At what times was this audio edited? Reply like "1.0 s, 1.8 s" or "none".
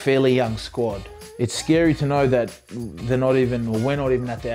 none